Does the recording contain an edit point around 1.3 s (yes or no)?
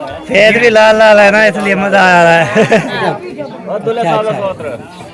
no